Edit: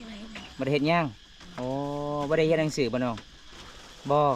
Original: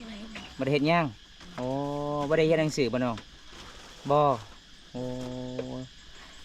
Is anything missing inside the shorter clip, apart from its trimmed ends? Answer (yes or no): no